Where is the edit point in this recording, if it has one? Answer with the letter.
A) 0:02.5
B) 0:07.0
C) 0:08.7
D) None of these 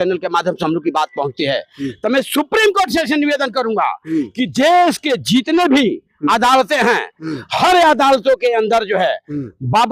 D